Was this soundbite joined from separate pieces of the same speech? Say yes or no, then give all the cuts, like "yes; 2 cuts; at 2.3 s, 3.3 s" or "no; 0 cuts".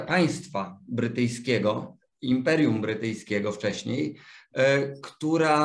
no; 0 cuts